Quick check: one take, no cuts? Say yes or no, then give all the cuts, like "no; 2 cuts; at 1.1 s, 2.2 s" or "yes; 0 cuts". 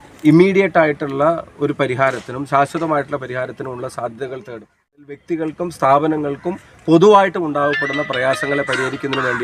no; 1 cut; at 5.2 s